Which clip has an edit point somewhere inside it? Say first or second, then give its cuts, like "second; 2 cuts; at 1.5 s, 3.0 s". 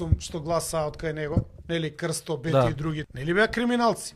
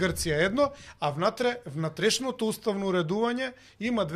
first; 2 cuts; at 1.6 s, 3.1 s